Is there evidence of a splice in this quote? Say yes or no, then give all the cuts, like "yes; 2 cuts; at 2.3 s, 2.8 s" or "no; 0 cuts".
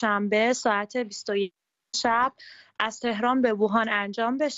no; 0 cuts